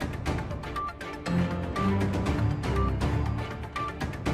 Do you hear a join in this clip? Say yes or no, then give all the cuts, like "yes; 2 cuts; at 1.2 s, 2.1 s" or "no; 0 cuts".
yes; 1 cut; at 1.4 s